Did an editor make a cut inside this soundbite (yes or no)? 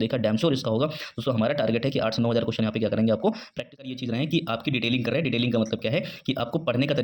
yes